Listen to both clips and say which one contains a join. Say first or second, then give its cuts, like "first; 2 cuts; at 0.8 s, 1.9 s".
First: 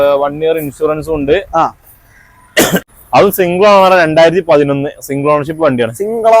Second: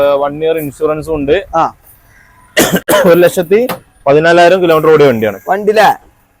first; 1 cut; at 2.8 s